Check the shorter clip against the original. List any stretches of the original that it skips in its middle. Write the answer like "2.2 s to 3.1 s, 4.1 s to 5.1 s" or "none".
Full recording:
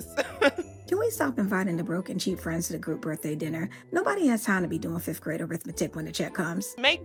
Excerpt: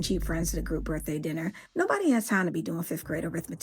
none